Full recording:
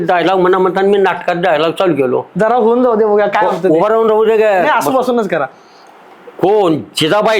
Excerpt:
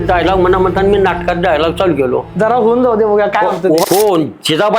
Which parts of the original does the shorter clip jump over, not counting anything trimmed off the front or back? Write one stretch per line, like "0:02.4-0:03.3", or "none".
0:03.8-0:06.4